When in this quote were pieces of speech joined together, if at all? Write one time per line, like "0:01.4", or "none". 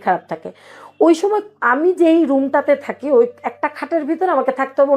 none